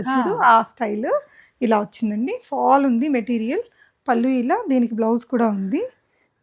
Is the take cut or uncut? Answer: uncut